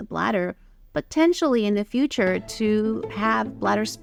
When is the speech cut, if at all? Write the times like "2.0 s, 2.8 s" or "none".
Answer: none

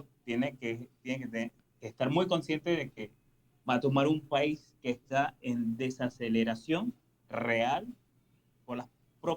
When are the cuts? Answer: none

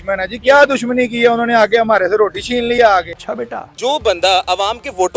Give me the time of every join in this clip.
3.4 s

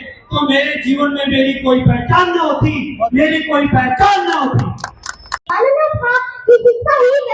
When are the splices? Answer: none

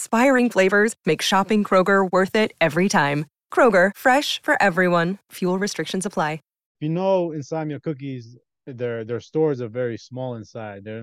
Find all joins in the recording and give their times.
6.7 s

